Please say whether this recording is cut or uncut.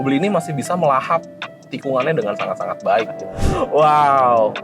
cut